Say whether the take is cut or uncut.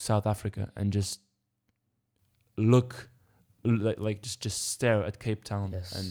uncut